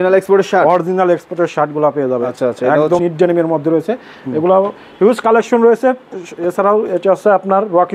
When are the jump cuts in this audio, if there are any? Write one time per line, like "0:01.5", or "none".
0:03.0